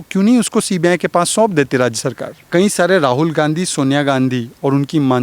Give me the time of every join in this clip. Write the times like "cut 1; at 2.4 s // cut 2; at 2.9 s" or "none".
cut 1; at 2.4 s